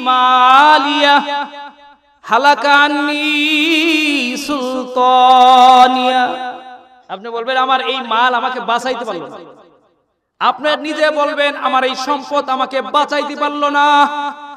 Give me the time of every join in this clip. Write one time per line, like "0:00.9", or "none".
none